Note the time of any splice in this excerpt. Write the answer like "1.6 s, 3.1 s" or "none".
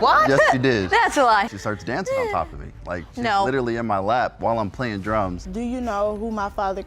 5.4 s